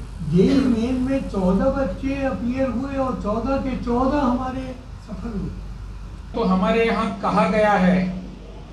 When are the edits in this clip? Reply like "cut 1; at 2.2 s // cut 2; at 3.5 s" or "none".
cut 1; at 6.3 s